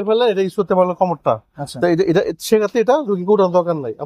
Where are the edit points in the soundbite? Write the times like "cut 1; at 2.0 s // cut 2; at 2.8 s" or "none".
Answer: none